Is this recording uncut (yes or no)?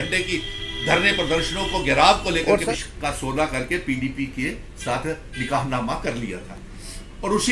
no